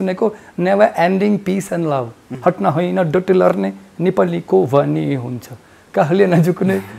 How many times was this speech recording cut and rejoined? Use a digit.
1